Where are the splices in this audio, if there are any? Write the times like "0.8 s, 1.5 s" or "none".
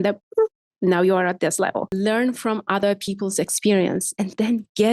1.9 s